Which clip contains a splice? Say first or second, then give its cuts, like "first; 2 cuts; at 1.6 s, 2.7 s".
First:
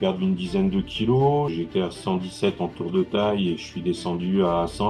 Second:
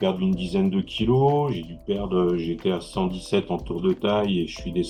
first; 1 cut; at 1.5 s